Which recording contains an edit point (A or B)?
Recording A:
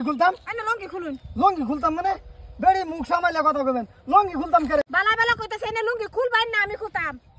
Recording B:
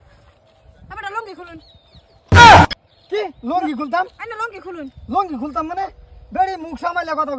A